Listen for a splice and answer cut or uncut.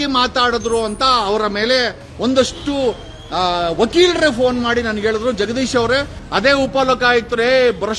cut